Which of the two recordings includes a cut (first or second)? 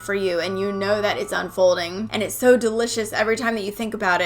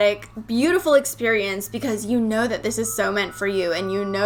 first